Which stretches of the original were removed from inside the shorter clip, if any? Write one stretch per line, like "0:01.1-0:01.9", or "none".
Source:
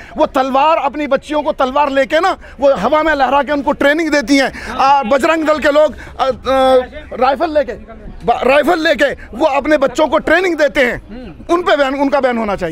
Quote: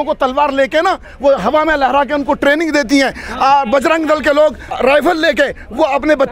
0:06.1-0:08.4